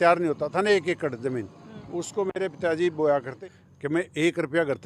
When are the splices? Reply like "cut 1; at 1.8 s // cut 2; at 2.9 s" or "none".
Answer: cut 1; at 3.3 s